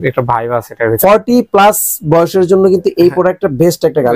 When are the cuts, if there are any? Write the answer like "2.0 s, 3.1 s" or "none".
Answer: 1.0 s